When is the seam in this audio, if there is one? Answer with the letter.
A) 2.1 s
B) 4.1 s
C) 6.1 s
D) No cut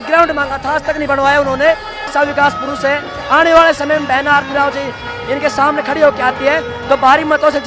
A